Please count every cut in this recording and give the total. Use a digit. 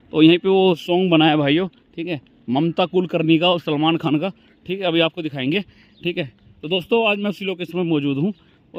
0